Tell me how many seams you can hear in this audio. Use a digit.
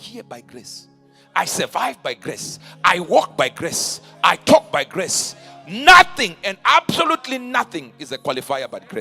0